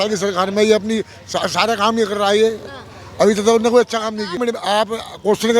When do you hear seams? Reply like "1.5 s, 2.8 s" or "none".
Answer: 4.4 s